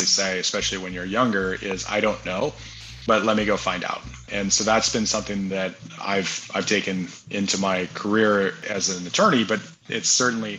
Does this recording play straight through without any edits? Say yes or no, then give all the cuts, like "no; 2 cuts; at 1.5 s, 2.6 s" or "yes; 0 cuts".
no; 3 cuts; at 4.2 s, 6.0 s, 8.6 s